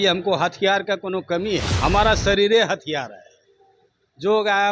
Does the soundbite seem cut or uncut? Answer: cut